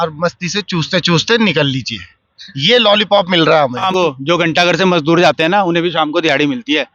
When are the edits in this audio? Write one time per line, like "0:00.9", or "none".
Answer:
0:03.9

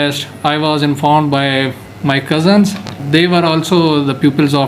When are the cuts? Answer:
0:03.0

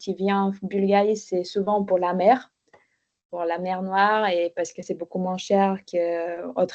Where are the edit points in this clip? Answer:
none

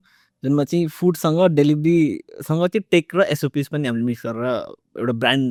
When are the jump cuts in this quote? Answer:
none

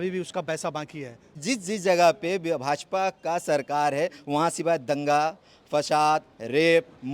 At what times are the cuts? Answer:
0:01.4

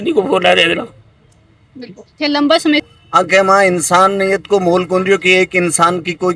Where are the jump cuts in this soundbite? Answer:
0:02.8

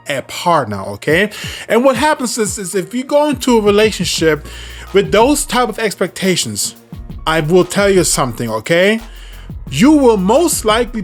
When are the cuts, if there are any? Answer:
none

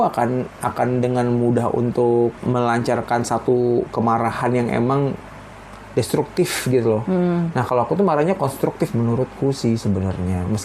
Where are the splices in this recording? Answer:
0:02.4

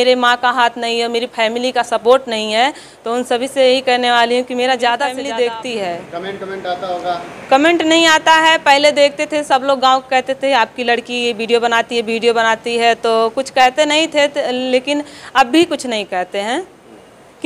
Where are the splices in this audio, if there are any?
0:05.1

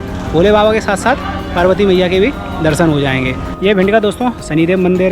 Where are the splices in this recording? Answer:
none

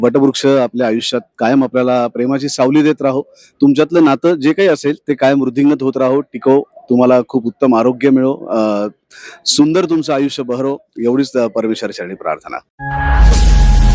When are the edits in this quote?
0:12.8

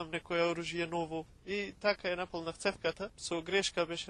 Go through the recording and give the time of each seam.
0:01.3
0:03.1

